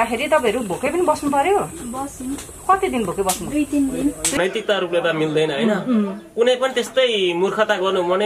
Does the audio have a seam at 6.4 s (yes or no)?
no